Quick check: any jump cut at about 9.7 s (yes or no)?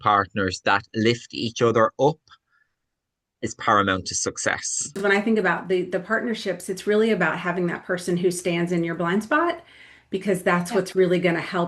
no